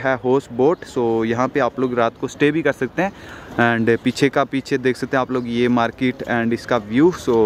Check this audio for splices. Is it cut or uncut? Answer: uncut